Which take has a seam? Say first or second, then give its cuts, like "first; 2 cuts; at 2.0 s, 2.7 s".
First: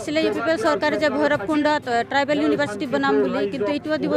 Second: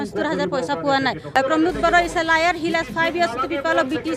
second; 1 cut; at 1.4 s